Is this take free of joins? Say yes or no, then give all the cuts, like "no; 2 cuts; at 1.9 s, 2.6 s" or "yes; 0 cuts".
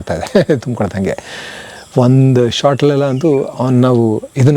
yes; 0 cuts